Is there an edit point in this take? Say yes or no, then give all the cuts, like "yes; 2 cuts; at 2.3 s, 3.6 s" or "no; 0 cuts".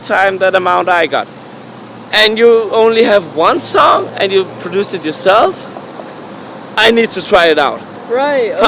no; 0 cuts